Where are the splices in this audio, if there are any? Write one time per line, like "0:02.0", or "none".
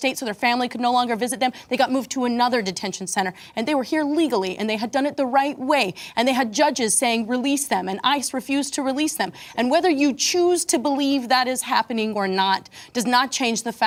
none

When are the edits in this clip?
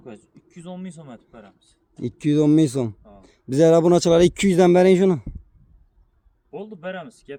none

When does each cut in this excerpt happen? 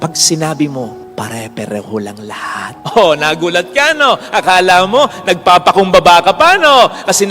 0:02.8

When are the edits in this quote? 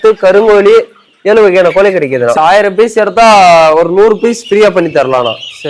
0:02.4

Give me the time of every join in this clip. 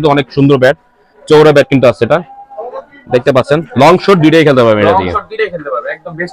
none

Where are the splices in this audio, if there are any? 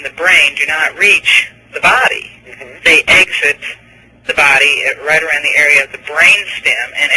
0:05.2

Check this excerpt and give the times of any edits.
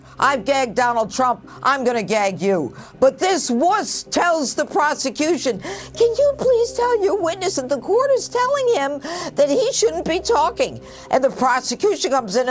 0:11.2

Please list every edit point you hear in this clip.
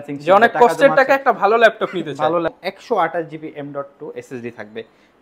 0:02.5

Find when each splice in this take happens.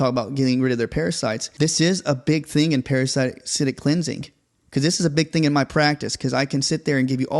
0:01.4

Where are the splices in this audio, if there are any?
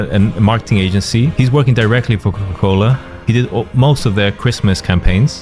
0:01.3

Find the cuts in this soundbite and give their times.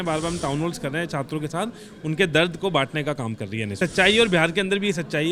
0:03.8

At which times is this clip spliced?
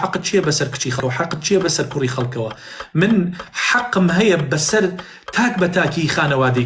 0:01.0

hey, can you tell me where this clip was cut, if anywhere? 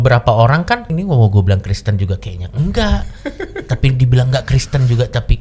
0:00.9

